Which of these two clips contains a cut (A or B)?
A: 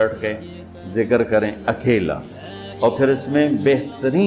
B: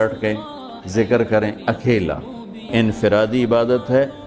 B